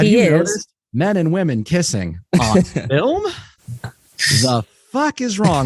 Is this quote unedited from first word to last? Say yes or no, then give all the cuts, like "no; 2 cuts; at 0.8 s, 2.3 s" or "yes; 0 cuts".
yes; 0 cuts